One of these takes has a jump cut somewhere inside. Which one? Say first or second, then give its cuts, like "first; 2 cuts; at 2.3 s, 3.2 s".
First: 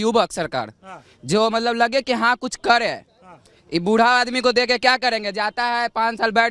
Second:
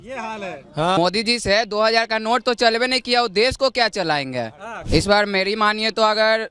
second; 2 cuts; at 1.0 s, 4.7 s